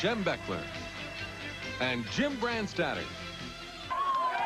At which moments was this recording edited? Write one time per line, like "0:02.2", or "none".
0:03.5